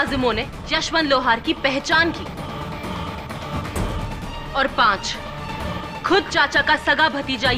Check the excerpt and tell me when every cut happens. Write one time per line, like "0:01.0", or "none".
none